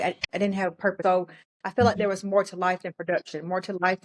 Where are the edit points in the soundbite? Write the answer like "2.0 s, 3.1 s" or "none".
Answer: 1.0 s